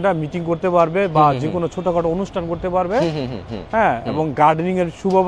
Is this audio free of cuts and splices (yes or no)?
yes